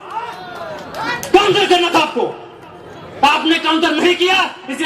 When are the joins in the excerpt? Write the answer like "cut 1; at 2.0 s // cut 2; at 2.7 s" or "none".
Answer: none